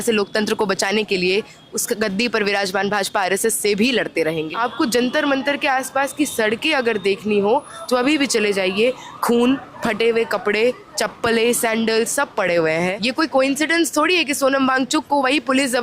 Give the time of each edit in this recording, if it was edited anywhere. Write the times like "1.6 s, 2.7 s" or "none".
4.5 s, 13.0 s